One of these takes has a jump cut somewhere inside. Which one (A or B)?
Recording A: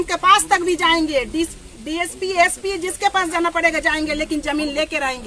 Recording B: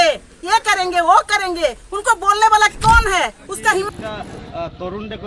B